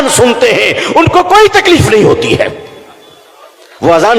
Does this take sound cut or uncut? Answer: uncut